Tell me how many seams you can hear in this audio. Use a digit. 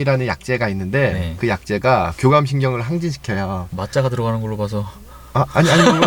0